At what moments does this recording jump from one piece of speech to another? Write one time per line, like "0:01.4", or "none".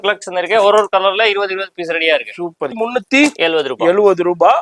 0:02.7